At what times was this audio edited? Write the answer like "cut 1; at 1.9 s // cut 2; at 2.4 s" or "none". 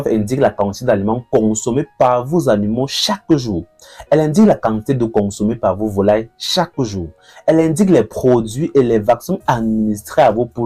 none